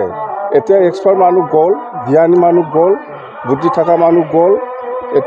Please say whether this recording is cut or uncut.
uncut